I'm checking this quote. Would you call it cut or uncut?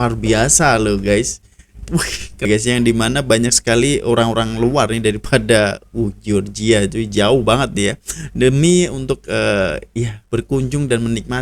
cut